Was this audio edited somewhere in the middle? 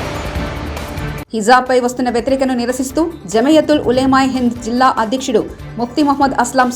yes; 1 cut; at 0.9 s

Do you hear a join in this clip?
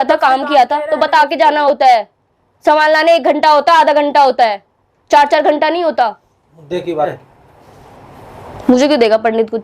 yes; 1 cut; at 7.1 s

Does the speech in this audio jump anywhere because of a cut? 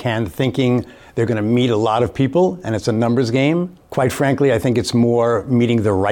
yes; 1 cut; at 3.8 s

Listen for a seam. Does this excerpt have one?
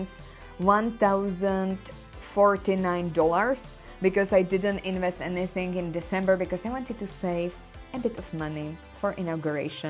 no; 0 cuts

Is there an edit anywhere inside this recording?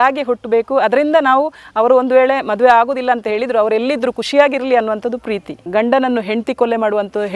yes; 1 cut; at 5.6 s

